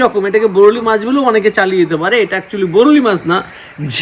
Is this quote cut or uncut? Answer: uncut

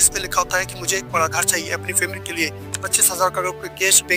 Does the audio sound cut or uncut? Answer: uncut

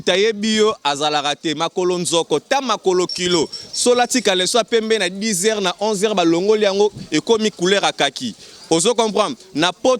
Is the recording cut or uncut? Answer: uncut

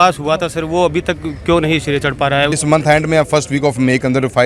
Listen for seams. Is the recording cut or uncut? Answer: cut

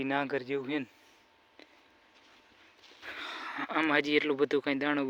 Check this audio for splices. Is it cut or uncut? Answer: uncut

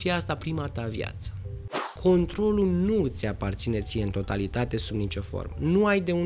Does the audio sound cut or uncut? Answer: cut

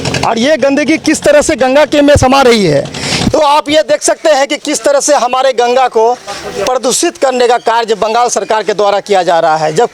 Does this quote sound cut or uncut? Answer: cut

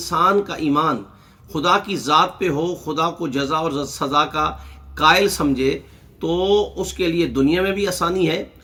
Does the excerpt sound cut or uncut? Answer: uncut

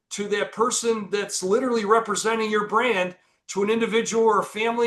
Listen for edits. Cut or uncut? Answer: uncut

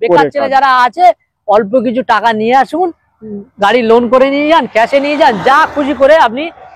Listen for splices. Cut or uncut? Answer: uncut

